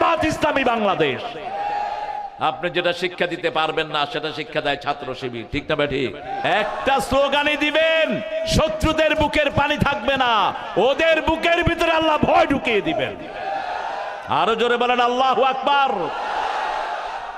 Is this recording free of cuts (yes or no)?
no